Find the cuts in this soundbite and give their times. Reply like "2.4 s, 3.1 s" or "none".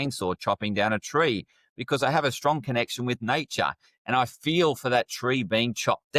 none